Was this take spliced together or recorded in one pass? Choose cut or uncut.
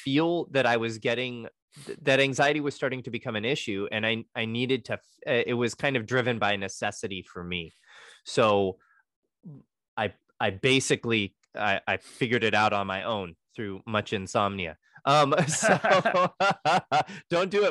cut